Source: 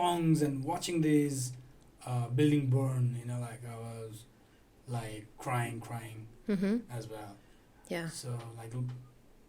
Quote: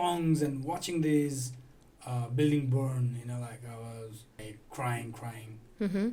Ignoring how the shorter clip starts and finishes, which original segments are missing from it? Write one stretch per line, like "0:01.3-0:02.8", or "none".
0:04.4-0:05.1